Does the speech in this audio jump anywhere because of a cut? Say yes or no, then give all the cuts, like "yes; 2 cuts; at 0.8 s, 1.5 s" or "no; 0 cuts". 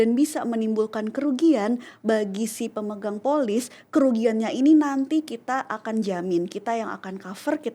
no; 0 cuts